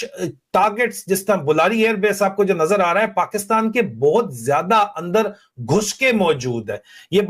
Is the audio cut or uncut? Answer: uncut